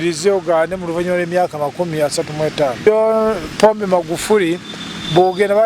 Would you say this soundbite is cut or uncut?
cut